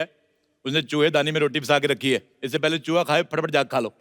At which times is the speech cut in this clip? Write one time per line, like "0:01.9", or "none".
0:02.3